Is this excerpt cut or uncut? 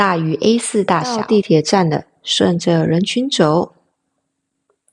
cut